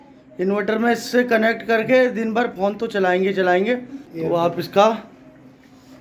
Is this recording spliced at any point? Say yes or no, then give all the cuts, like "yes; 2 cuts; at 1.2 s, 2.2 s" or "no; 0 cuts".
no; 0 cuts